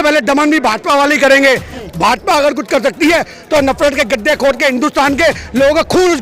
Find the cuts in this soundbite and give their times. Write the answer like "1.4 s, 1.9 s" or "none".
1.8 s